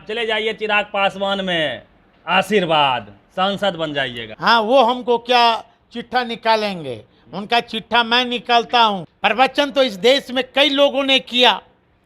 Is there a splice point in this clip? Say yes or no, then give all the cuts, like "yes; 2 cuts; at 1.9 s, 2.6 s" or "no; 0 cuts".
yes; 2 cuts; at 4.2 s, 9.1 s